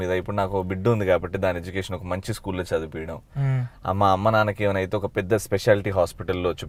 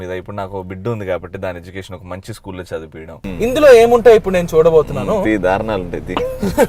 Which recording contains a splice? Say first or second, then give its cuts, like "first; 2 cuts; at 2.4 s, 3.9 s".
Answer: second; 1 cut; at 3.2 s